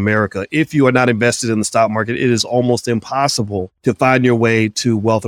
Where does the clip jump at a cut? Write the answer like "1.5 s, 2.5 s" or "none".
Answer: 3.7 s